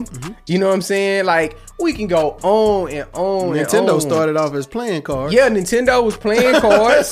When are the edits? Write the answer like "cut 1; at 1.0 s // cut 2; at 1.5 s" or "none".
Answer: none